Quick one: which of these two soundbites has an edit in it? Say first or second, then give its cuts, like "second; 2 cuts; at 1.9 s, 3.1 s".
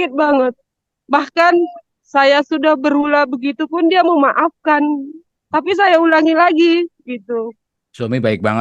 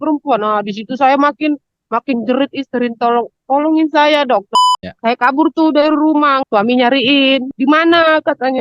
second; 3 cuts; at 4.5 s, 6.4 s, 7.5 s